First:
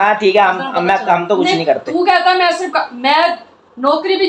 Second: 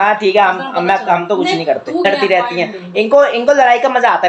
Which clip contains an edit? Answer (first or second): second